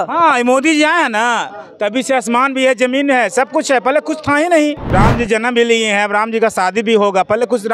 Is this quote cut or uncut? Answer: cut